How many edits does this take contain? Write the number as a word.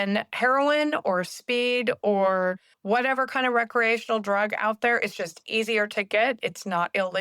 one